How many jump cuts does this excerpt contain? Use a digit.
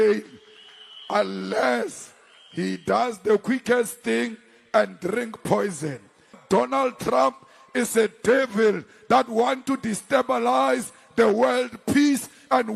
1